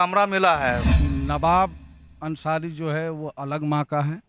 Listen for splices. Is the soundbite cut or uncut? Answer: cut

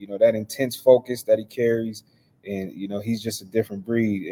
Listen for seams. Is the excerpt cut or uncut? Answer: uncut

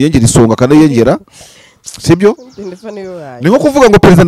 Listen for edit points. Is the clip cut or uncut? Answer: uncut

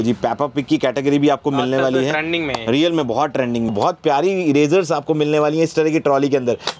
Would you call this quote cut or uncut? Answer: cut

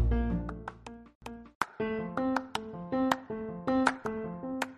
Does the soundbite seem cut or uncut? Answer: cut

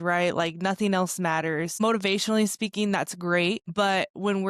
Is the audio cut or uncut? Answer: cut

